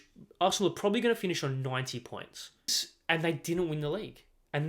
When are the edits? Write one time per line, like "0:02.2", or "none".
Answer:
0:02.8

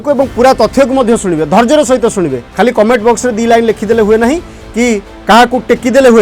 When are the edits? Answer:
0:02.4
0:05.1

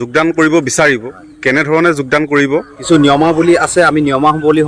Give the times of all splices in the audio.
0:02.7

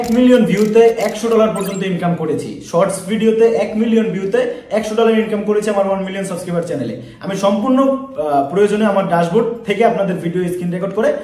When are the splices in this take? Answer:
none

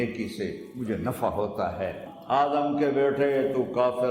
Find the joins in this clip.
0:02.1

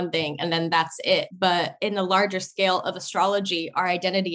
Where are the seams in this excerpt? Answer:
0:01.5

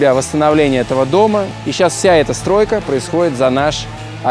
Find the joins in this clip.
0:01.5

